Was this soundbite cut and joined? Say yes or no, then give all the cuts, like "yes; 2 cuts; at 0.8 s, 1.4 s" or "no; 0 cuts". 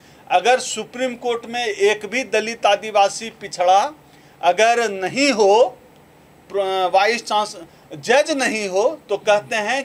no; 0 cuts